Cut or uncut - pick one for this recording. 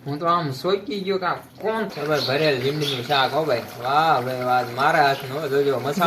cut